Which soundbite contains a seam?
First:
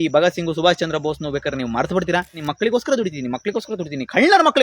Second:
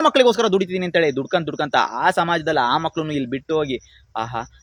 first; 1 cut; at 2.4 s

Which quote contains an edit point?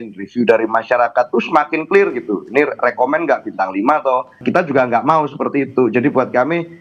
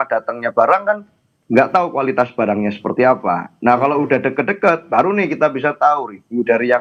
first; 1 cut; at 4.4 s

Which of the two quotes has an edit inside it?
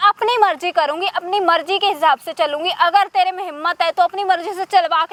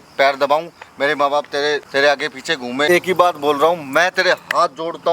second; 2 cuts; at 1.9 s, 2.9 s

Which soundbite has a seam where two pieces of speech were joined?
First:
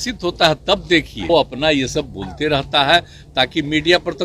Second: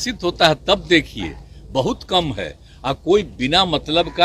first; 1 cut; at 1.3 s

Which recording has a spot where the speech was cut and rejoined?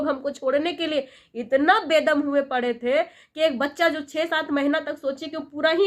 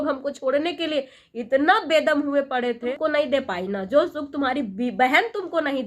second; 1 cut; at 2.9 s

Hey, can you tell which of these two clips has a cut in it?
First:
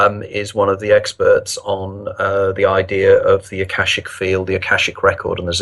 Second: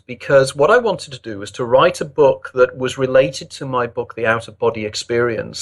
second; 1 cut; at 1.1 s

